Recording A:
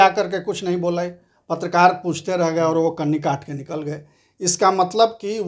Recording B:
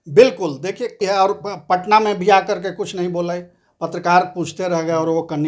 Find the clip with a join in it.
B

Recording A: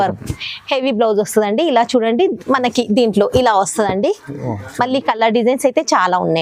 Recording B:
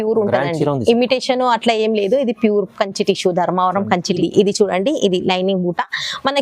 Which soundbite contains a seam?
B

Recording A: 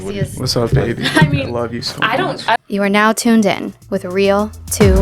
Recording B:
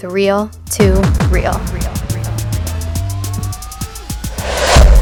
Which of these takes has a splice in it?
A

